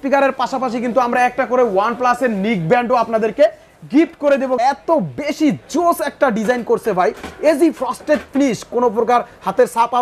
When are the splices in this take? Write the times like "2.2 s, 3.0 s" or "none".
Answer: 4.6 s